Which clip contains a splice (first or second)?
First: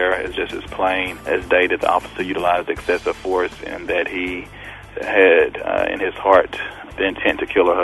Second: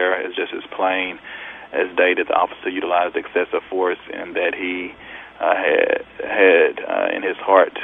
first